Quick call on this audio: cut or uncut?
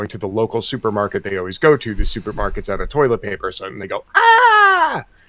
uncut